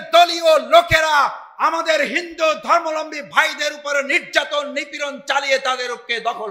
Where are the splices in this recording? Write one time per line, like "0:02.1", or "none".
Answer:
none